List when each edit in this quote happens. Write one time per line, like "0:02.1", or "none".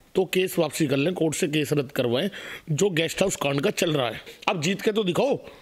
0:04.3